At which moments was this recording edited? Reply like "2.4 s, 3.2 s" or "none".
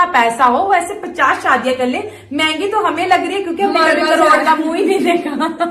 none